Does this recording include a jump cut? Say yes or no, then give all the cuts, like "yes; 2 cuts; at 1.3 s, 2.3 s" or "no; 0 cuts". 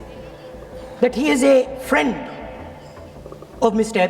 no; 0 cuts